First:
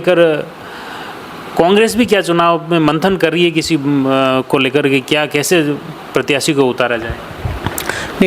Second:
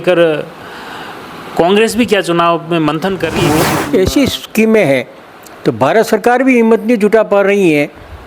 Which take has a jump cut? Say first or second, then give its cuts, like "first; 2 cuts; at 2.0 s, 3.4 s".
second; 1 cut; at 3.5 s